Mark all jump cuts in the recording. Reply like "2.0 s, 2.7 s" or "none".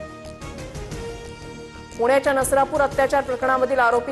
1.8 s